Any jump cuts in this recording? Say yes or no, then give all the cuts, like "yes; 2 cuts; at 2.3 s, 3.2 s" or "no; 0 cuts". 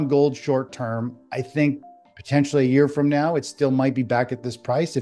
no; 0 cuts